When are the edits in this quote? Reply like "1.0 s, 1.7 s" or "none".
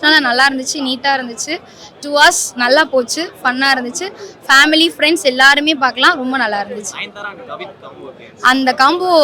none

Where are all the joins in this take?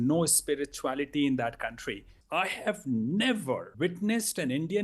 2.1 s, 3.7 s

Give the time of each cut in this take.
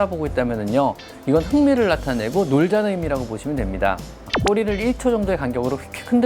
4.3 s

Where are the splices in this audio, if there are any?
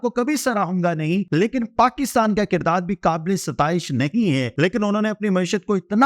1.3 s, 4.5 s

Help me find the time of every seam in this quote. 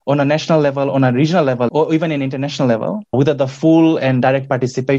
1.7 s, 3.1 s

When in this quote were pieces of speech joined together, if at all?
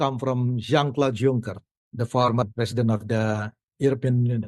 2.4 s

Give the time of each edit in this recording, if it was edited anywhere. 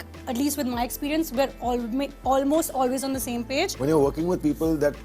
3.7 s

